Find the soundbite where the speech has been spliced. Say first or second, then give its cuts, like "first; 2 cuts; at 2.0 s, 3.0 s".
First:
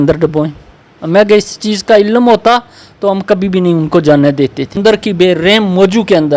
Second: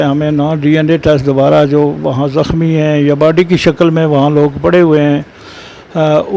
first; 1 cut; at 4.8 s